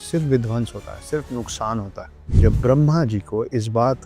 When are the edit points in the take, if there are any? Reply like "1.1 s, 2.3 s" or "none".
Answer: 2.0 s